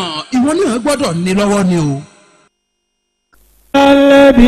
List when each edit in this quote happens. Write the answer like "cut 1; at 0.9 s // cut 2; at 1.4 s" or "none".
cut 1; at 3.5 s